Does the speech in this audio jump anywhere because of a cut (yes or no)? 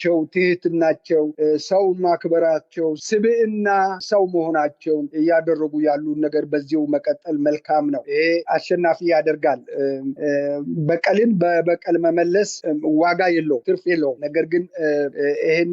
yes